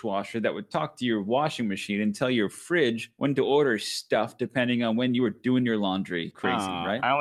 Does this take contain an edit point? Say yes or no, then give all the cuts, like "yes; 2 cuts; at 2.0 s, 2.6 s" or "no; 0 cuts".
no; 0 cuts